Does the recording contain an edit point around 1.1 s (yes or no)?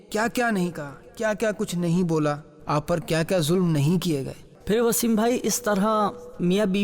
no